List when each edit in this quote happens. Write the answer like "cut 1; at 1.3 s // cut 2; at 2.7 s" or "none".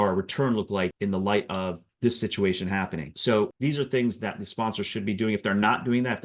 cut 1; at 0.9 s // cut 2; at 1.9 s // cut 3; at 3.4 s